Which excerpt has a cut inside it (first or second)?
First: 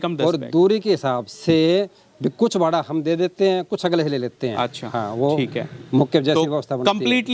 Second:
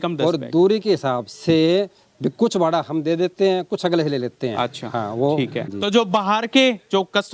second